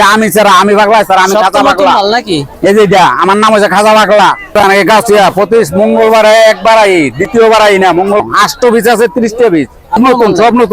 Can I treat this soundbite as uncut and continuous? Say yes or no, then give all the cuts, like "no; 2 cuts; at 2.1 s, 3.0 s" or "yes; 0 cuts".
no; 3 cuts; at 4.6 s, 8.2 s, 10.0 s